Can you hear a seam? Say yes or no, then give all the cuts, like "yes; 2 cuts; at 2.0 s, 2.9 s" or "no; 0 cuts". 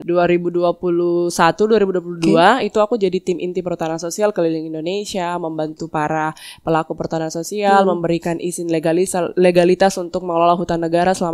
no; 0 cuts